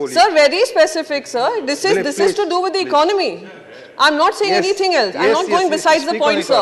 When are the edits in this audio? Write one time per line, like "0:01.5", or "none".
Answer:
none